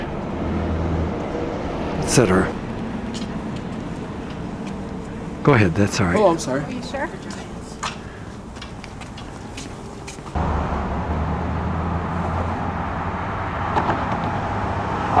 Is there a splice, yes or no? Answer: yes